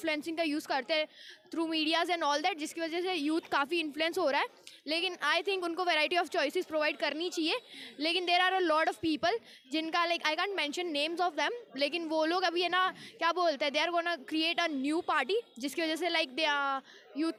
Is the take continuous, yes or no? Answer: yes